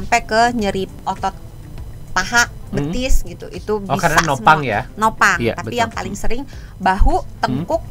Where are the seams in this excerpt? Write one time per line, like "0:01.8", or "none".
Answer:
0:01.0